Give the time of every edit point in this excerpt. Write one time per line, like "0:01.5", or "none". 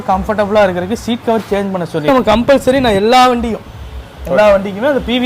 0:02.1